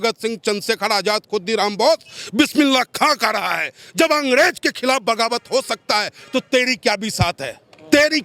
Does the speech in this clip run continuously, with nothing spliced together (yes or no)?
yes